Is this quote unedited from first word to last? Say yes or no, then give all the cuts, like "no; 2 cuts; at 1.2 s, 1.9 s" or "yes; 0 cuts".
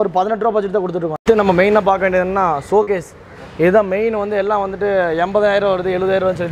no; 1 cut; at 1.1 s